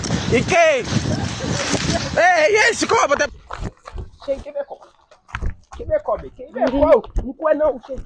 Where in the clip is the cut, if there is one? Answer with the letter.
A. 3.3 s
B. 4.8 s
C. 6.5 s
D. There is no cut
A